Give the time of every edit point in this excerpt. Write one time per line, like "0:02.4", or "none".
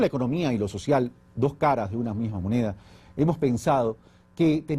0:02.3